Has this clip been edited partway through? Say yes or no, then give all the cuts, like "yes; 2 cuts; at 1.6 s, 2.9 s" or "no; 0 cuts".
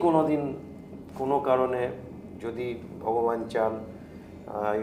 no; 0 cuts